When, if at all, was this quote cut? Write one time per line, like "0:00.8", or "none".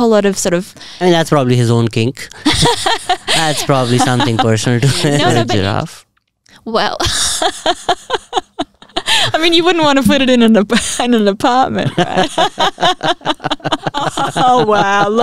0:05.4
0:14.2